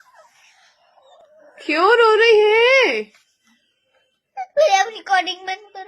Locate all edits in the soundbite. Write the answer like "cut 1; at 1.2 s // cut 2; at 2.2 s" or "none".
cut 1; at 1.2 s